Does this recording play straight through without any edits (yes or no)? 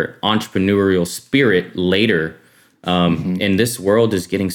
yes